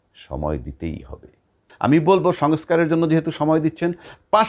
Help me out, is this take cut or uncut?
cut